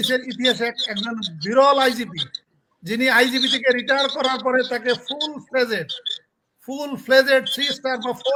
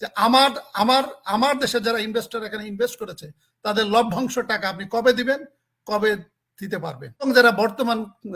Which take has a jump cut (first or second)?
second